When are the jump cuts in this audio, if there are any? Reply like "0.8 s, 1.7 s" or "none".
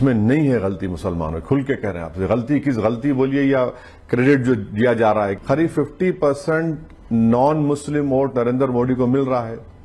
5.4 s